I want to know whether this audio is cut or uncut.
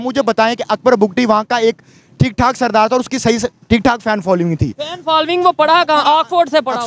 uncut